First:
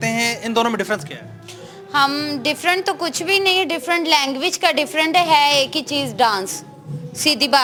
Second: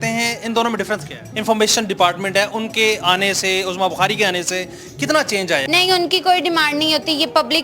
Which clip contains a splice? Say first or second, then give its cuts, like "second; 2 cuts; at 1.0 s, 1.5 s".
second; 2 cuts; at 1.3 s, 5.6 s